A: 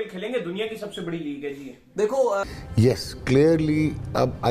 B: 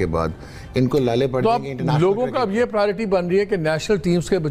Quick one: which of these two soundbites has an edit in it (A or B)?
A